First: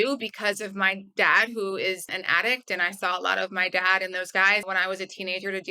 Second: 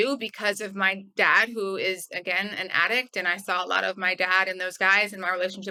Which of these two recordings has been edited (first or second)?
first